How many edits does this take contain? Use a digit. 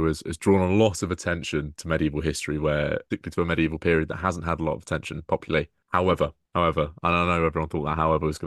3